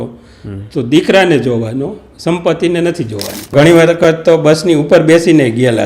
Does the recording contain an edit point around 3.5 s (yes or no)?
yes